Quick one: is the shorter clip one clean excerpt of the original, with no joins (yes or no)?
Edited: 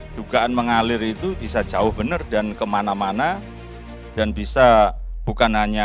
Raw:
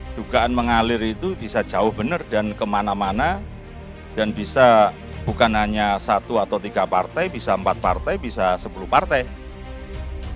yes